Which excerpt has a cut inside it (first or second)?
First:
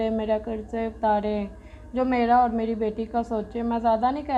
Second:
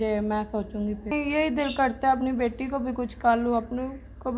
second